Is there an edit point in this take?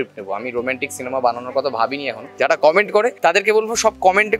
yes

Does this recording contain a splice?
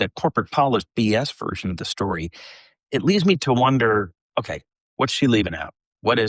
no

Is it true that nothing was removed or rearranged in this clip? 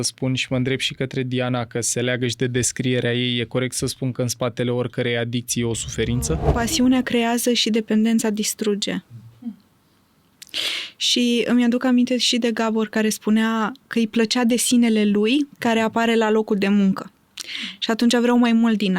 no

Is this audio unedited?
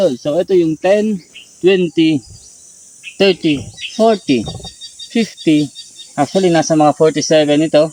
yes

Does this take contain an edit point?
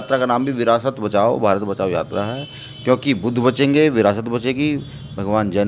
no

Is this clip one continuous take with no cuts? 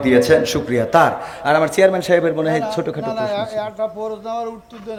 yes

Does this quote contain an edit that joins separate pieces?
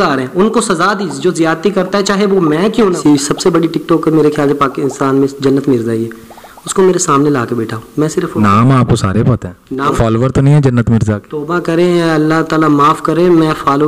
yes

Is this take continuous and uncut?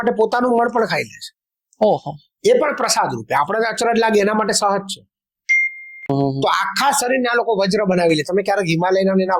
no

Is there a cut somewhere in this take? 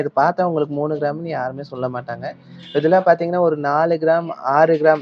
no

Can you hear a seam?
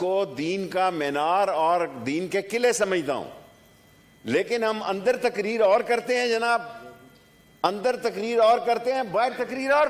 no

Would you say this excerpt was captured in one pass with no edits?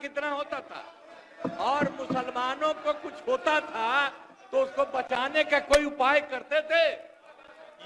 yes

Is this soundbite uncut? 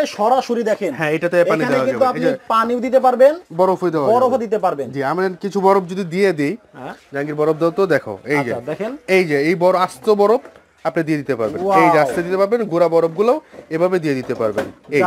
yes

